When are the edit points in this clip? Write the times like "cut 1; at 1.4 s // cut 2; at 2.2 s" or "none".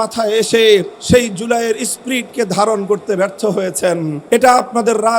cut 1; at 0.9 s // cut 2; at 4.2 s